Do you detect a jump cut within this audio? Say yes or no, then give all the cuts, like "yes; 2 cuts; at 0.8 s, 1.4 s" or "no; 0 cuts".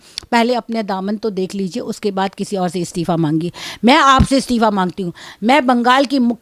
no; 0 cuts